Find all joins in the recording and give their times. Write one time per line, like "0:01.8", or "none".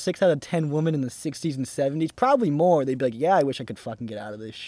none

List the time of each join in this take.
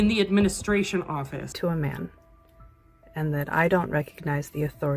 0:01.5

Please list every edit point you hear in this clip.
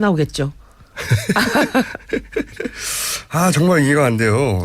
none

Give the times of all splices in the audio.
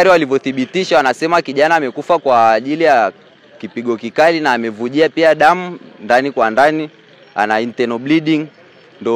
none

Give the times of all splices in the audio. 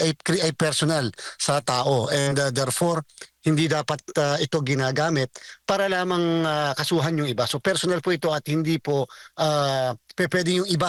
none

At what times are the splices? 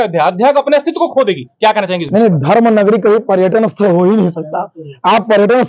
none

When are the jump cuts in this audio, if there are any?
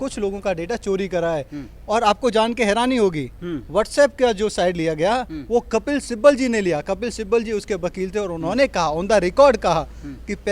none

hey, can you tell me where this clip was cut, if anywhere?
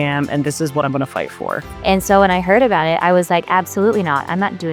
0:01.6

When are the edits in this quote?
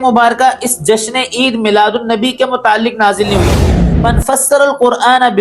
0:03.8

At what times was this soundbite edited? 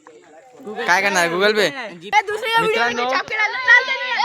0:01.9

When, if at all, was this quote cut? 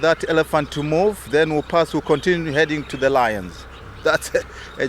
0:03.9

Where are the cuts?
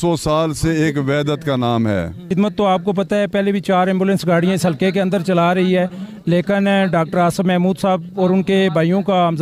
0:02.3

